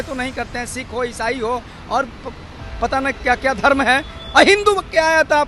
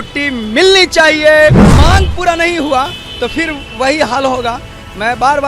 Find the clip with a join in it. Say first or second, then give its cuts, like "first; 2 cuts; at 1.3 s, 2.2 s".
second; 1 cut; at 1.6 s